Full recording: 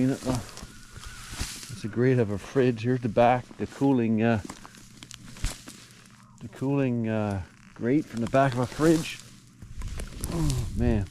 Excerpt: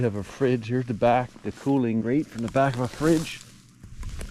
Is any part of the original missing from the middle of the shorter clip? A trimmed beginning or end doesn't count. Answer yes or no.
yes